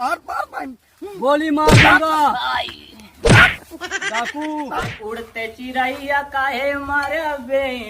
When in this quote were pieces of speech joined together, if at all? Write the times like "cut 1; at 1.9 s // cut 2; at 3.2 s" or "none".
cut 1; at 4.8 s